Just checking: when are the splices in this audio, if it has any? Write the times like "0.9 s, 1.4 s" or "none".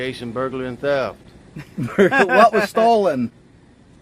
0.9 s